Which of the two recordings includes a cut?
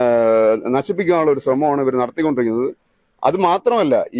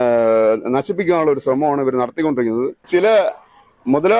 second; 1 cut; at 2.9 s

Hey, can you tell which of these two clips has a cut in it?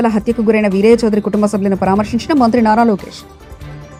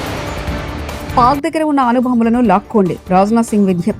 second; 1 cut; at 1.1 s

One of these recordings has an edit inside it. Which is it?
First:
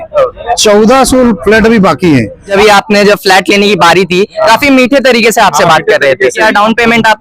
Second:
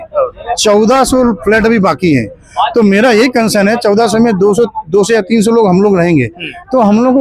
first; 2 cuts; at 2.5 s, 6.4 s

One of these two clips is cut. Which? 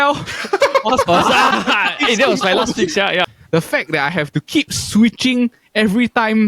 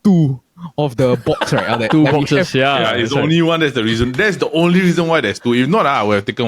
first; 2 cuts; at 1.5 s, 3.2 s

